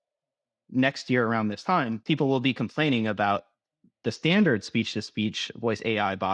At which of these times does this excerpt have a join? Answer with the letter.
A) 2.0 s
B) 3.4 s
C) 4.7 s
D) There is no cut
A